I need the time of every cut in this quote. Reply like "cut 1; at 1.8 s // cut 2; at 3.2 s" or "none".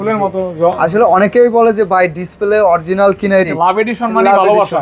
cut 1; at 3.5 s